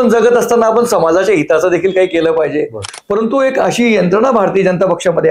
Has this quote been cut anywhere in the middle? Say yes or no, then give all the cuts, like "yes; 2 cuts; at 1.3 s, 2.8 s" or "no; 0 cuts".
yes; 1 cut; at 2.8 s